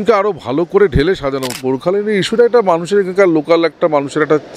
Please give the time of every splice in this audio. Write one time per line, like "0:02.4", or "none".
0:01.5